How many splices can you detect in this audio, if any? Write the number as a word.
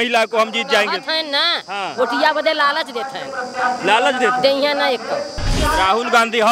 one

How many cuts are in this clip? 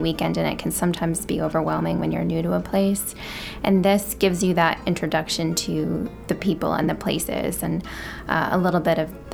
zero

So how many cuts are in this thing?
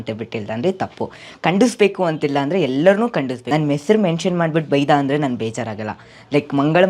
one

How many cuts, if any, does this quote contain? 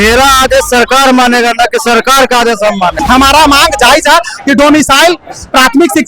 one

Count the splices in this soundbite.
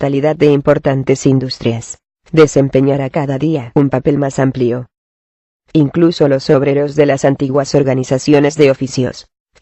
zero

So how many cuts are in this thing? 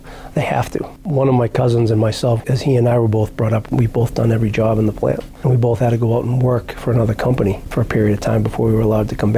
four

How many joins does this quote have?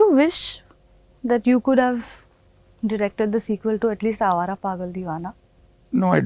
zero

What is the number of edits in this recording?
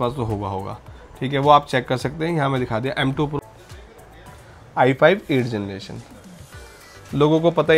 one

